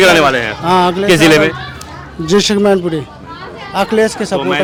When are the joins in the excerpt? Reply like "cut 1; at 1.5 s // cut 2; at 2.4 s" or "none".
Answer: none